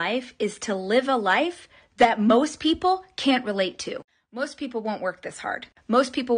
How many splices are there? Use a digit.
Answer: 1